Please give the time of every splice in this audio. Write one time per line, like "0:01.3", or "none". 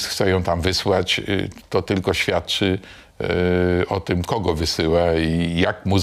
none

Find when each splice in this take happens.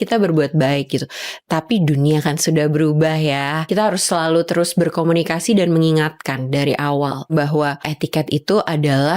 0:03.7
0:07.6

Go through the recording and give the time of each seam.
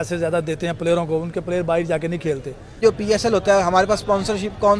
0:02.8

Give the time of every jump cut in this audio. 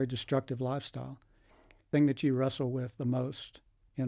0:01.9

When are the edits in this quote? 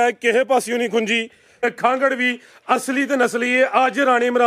0:01.6

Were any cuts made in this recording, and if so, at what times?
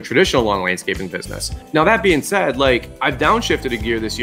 0:02.9

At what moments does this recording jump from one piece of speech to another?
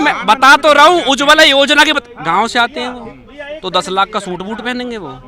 none

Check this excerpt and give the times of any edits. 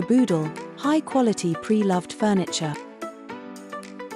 0:02.8

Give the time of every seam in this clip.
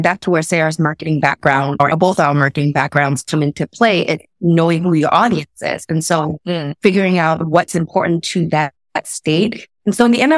0:01.8

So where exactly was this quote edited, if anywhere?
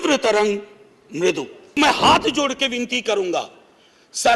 0:01.8

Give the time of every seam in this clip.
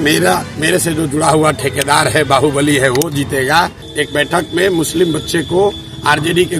0:03.8

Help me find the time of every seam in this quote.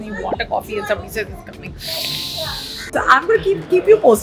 0:02.9

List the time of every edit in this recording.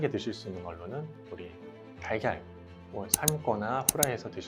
none

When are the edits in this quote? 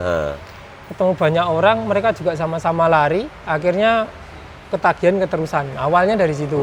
none

